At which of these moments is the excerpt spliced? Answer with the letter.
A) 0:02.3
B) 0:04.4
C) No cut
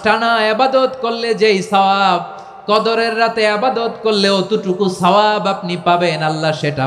C